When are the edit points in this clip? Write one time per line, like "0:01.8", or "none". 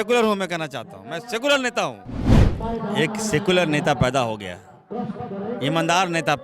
0:02.4